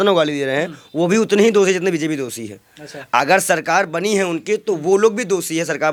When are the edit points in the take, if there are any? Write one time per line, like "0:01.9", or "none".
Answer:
none